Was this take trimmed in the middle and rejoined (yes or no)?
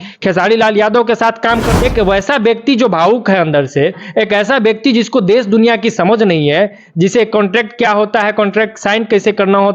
yes